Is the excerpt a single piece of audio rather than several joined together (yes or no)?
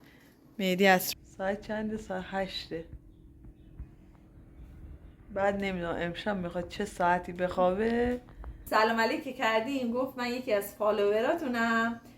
no